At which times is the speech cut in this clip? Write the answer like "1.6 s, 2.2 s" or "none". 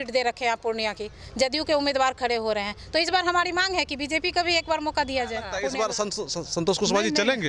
5.5 s